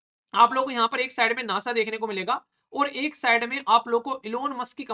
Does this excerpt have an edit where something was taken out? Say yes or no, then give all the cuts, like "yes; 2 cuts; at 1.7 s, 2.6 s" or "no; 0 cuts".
no; 0 cuts